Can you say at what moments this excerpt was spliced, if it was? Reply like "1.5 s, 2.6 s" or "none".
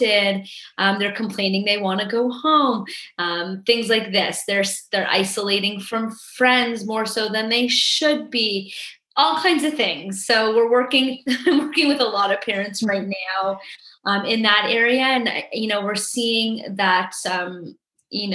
none